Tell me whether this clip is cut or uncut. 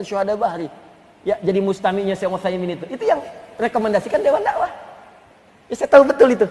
uncut